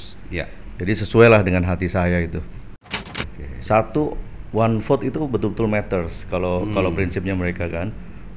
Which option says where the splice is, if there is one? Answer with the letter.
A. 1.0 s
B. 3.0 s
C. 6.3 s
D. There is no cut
B